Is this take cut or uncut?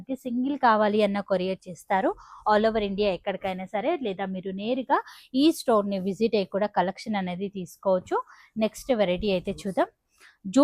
uncut